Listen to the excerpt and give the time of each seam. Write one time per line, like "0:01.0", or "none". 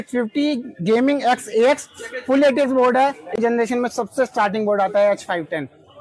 0:03.4